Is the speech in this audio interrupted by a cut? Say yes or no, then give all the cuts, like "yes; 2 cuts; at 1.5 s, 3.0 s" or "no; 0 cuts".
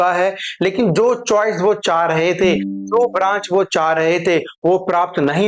no; 0 cuts